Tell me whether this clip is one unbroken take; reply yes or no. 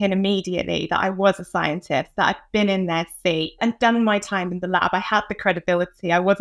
no